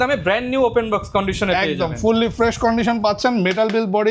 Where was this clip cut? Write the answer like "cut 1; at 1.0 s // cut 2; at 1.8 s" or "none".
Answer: none